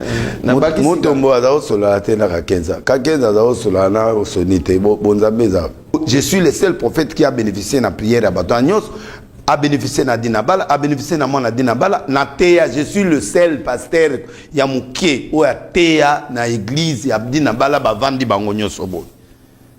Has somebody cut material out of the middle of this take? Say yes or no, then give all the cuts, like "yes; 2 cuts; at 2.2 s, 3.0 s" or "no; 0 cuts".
yes; 1 cut; at 5.9 s